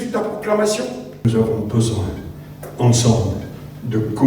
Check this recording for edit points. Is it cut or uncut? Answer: cut